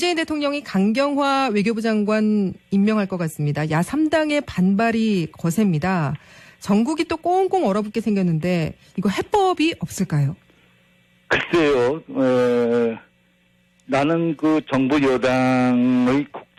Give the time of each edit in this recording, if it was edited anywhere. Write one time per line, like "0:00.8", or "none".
none